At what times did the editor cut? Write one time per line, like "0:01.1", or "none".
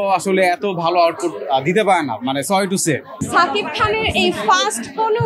0:03.2